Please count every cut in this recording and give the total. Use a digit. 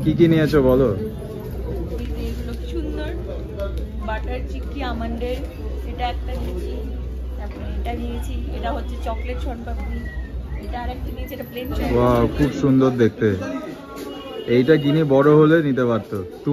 1